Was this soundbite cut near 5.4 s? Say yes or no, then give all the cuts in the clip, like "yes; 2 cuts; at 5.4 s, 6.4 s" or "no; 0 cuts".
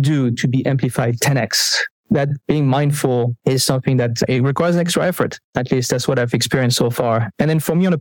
no; 0 cuts